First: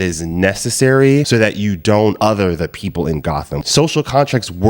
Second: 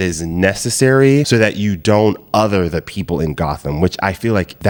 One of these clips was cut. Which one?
first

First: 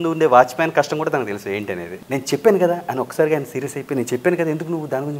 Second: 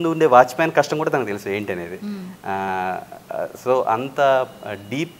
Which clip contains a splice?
first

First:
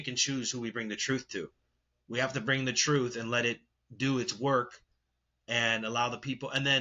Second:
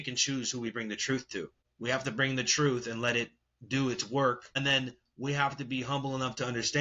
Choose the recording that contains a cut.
second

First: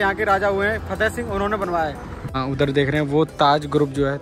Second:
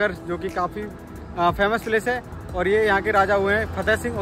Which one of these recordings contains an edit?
first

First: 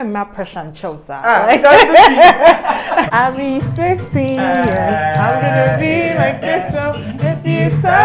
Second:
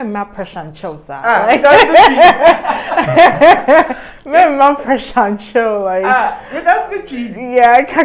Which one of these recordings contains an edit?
first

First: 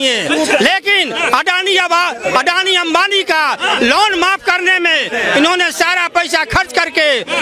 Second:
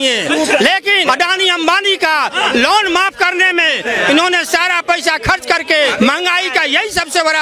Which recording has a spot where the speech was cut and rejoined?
second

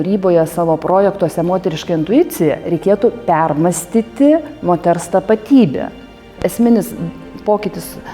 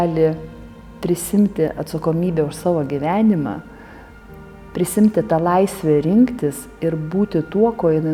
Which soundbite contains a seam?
first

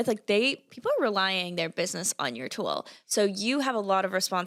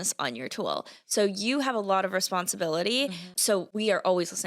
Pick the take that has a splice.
second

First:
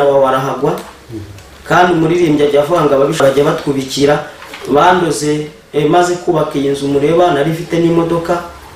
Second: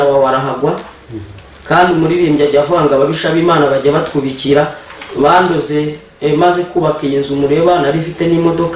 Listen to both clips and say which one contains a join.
first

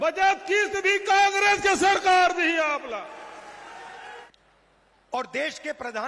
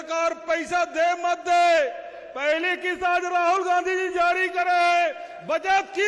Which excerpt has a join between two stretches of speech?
first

